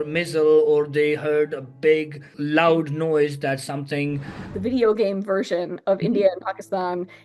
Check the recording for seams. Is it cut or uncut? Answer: cut